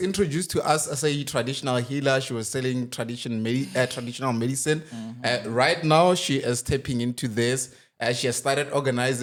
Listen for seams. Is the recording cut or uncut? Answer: uncut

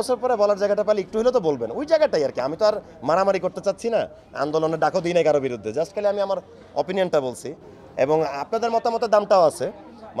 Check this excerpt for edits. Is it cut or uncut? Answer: uncut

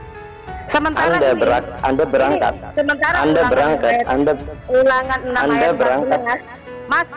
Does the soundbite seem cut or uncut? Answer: uncut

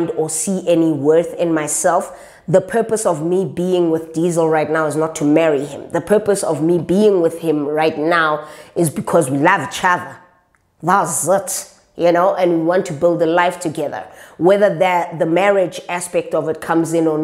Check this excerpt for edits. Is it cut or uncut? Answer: uncut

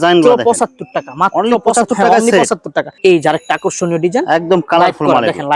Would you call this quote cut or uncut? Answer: uncut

